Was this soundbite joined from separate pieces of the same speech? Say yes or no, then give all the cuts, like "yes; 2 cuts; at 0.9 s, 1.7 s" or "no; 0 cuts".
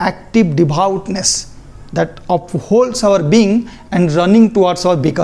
no; 0 cuts